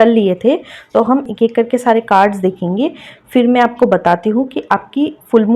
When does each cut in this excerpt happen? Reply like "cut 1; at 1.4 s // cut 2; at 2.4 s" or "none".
cut 1; at 1.2 s